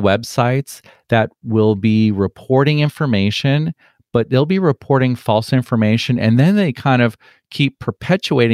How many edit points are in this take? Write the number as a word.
zero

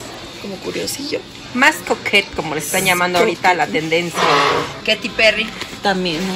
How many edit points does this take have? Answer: one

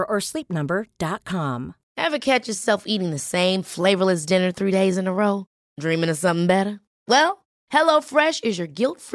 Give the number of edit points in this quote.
one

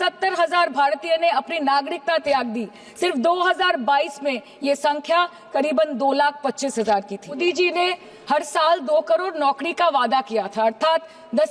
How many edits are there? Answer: one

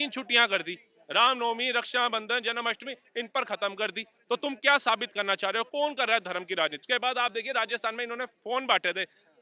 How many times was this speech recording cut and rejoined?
one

